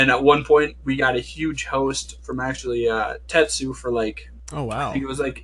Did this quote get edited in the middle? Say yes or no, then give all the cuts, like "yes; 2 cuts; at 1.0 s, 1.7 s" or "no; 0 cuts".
no; 0 cuts